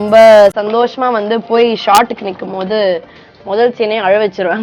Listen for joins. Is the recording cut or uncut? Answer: uncut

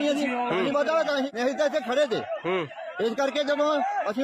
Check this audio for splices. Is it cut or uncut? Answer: cut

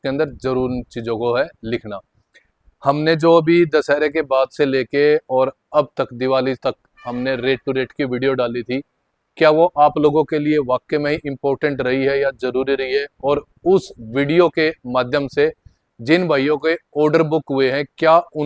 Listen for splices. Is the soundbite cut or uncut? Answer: uncut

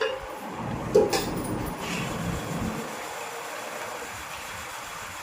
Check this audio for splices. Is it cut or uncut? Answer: cut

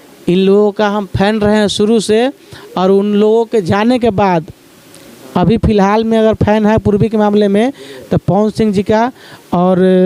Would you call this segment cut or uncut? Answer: uncut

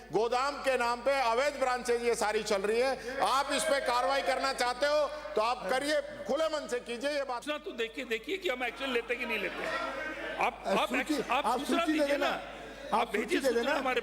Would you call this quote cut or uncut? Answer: cut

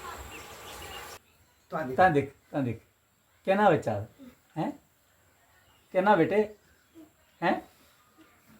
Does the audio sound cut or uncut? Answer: cut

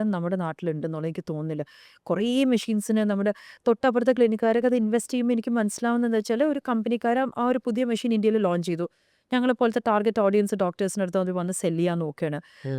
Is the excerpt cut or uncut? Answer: uncut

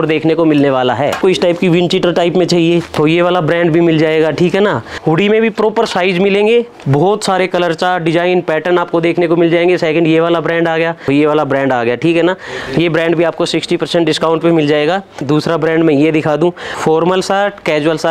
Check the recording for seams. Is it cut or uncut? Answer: cut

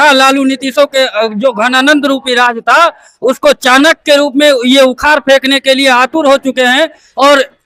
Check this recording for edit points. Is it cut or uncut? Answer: uncut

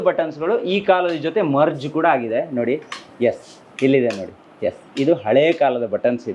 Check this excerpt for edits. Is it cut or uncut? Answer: uncut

